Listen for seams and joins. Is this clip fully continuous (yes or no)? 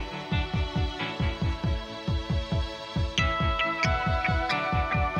yes